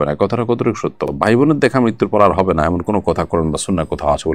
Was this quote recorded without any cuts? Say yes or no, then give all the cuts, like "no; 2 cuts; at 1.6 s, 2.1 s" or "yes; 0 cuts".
yes; 0 cuts